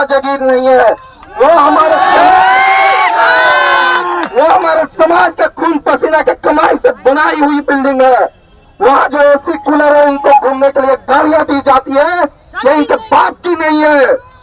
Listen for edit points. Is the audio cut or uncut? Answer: uncut